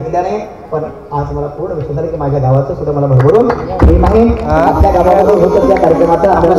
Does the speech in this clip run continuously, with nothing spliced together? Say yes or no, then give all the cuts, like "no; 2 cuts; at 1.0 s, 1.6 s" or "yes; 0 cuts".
yes; 0 cuts